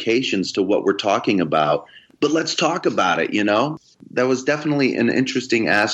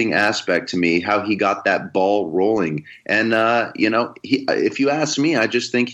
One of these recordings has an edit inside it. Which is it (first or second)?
first